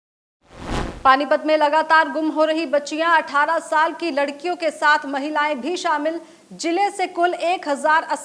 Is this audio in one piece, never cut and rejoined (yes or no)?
no